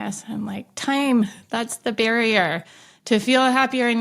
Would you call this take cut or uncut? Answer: uncut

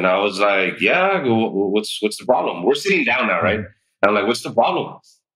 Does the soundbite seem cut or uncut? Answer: uncut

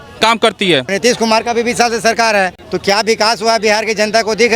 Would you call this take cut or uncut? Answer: cut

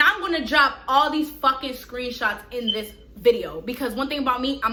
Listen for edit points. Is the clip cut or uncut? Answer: uncut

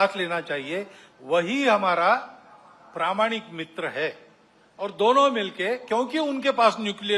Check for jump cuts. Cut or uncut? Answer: uncut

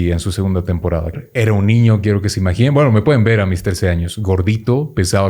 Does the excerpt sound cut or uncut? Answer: cut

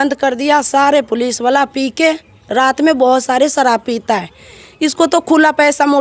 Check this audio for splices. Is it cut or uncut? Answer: uncut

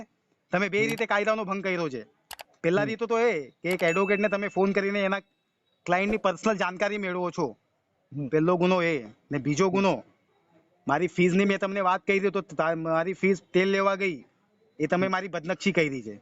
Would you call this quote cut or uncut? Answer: uncut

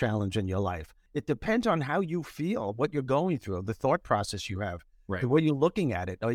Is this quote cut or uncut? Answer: cut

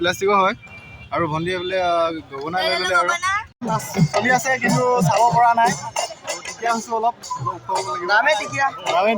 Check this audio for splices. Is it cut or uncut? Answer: cut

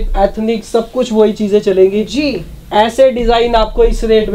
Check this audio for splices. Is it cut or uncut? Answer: uncut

